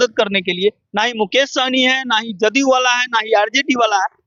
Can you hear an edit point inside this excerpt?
no; 0 cuts

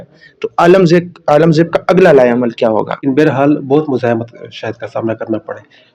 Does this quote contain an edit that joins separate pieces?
yes; 1 cut; at 3.0 s

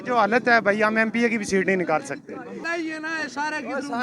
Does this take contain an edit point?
yes; 1 cut; at 2.6 s

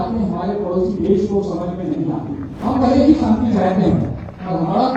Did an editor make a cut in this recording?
yes; 1 cut; at 2.5 s

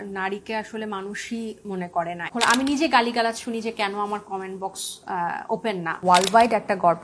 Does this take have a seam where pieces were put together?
yes; 2 cuts; at 2.2 s, 5.9 s

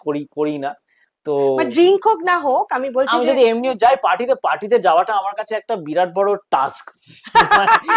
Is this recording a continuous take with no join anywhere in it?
yes; 0 cuts

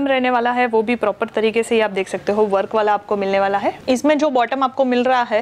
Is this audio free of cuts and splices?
no; 1 cut; at 3.8 s

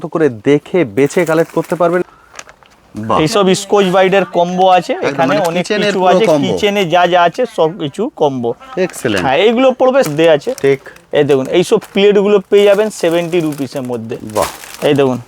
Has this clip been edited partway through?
yes; 2 cuts; at 2.0 s, 10.1 s

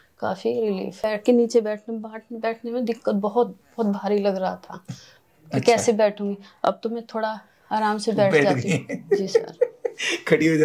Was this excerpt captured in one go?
no; 1 cut; at 1.0 s

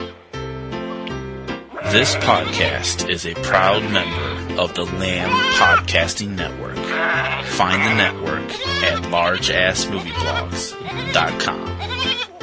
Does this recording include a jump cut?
no; 0 cuts

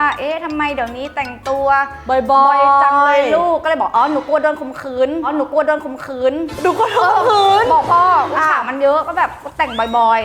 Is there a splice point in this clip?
no; 0 cuts

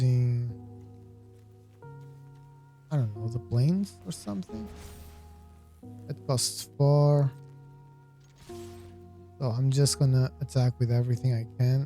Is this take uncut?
no; 4 cuts; at 1.2 s, 2.8 s, 7.3 s, 9.1 s

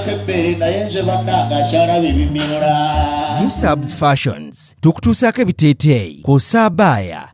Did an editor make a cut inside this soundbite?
yes; 1 cut; at 3.4 s

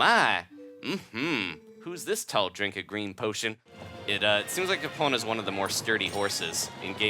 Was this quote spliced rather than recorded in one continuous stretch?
yes; 1 cut; at 3.6 s

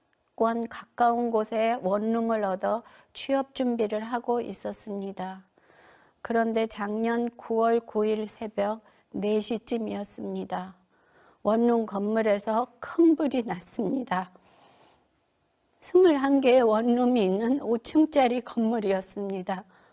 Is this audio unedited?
no; 1 cut; at 15.1 s

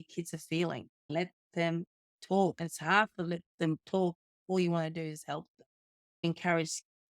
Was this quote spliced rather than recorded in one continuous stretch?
yes; 3 cuts; at 1.1 s, 2.6 s, 6.2 s

